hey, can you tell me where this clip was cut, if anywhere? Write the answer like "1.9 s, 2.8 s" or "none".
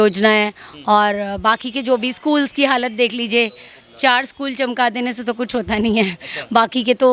none